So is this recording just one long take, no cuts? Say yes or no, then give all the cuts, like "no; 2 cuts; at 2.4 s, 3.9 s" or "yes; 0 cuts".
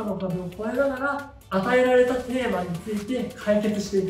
yes; 0 cuts